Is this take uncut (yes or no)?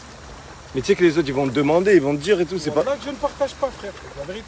yes